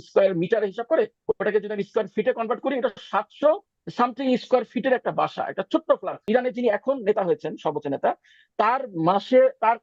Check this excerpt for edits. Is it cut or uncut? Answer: cut